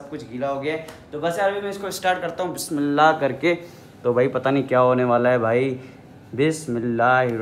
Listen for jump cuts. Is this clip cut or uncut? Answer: cut